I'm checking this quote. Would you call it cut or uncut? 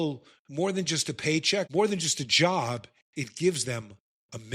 cut